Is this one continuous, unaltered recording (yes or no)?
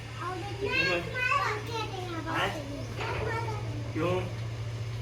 yes